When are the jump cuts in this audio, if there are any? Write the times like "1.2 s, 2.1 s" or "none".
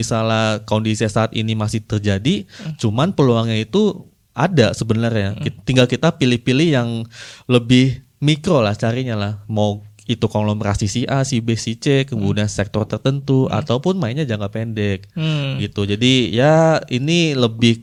none

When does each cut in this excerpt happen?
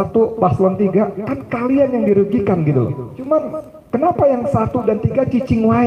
3.1 s

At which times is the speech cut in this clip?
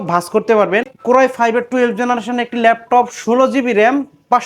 0.9 s

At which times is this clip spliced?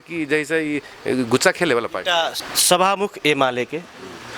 2.3 s

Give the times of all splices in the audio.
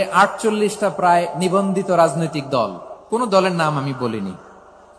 2.9 s

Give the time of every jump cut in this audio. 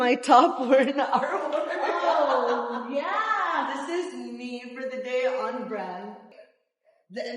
6.2 s

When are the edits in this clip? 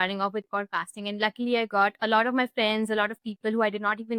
none

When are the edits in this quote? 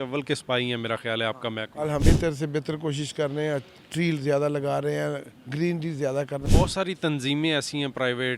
2.0 s, 6.4 s

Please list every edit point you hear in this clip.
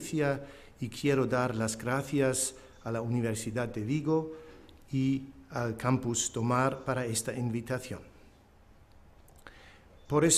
2.4 s

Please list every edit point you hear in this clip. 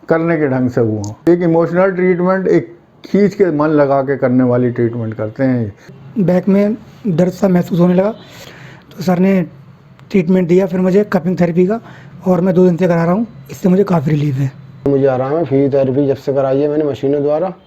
1.1 s, 6.0 s, 14.8 s

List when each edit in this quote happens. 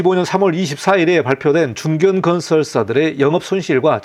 none

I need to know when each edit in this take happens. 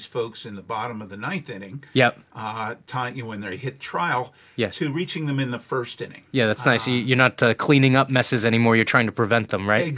none

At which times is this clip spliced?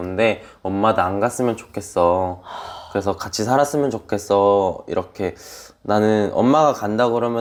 none

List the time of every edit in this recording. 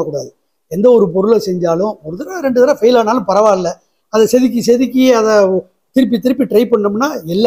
none

